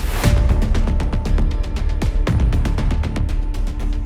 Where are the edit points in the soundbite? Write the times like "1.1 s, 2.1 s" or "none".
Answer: none